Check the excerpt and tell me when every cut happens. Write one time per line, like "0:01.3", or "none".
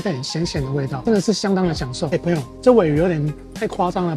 0:02.0